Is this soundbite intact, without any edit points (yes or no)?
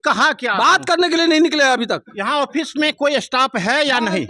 yes